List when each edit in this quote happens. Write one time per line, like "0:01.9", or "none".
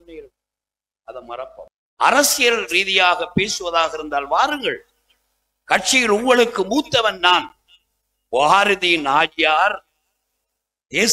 0:01.8